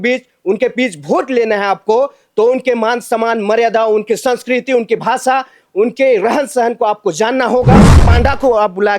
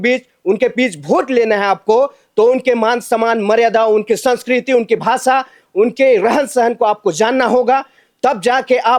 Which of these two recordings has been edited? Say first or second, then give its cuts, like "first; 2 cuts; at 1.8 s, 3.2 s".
first; 1 cut; at 8.0 s